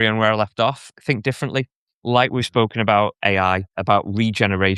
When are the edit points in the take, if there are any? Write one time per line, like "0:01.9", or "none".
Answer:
0:00.9
0:03.7